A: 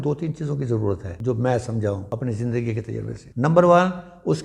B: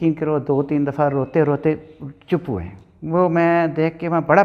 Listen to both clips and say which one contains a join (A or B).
A